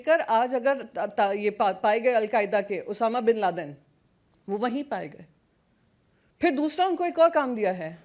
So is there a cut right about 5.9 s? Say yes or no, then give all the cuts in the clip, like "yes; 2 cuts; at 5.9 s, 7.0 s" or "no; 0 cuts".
no; 0 cuts